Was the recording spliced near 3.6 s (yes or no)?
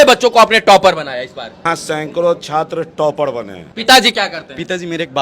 yes